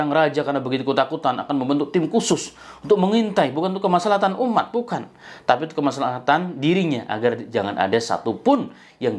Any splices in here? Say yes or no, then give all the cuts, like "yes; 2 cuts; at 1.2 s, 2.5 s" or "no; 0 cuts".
no; 0 cuts